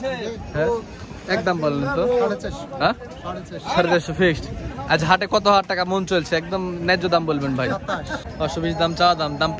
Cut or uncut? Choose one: cut